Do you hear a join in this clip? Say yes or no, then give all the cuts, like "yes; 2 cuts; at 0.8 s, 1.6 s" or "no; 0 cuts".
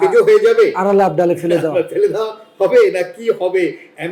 no; 0 cuts